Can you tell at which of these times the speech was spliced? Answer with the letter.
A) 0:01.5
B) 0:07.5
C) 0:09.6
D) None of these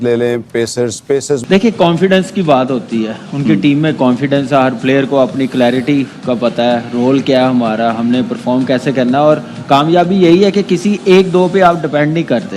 A